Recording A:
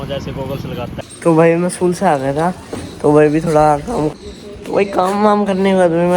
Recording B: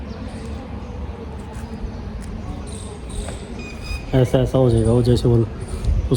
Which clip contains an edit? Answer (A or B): A